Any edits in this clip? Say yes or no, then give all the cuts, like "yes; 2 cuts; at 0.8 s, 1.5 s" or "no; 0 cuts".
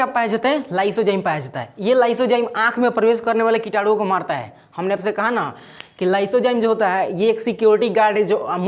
no; 0 cuts